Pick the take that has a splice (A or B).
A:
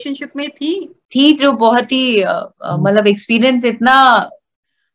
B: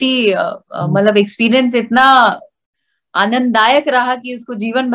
A